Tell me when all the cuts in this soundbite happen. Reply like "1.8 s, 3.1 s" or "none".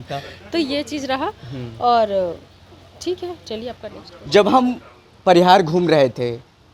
none

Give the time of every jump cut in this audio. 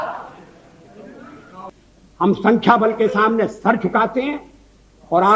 1.7 s

